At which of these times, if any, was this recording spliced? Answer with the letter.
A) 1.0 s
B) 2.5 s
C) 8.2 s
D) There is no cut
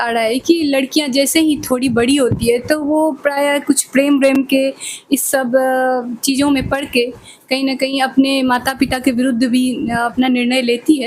D